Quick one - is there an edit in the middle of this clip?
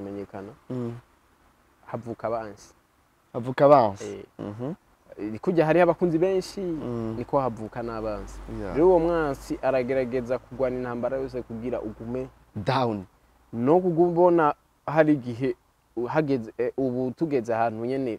no; 0 cuts

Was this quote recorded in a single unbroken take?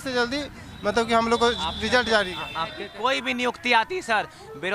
no; 1 cut; at 2.8 s

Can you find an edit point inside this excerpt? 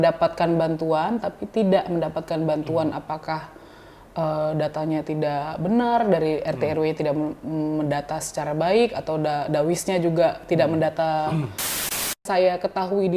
yes; 1 cut; at 12.1 s

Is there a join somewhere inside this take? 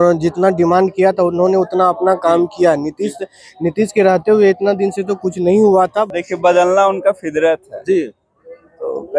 yes; 1 cut; at 6.1 s

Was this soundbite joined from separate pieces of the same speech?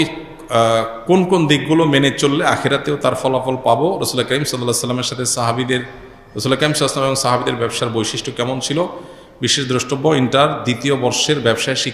no; 0 cuts

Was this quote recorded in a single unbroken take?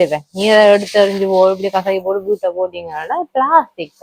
yes; 0 cuts

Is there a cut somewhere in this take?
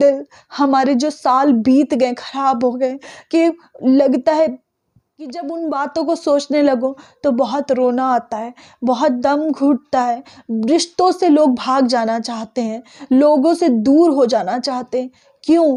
no; 0 cuts

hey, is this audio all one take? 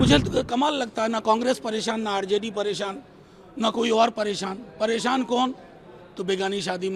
yes; 0 cuts

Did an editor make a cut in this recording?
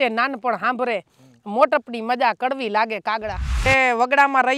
yes; 1 cut; at 3.7 s

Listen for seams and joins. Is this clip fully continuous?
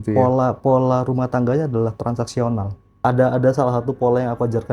no; 1 cut; at 3.0 s

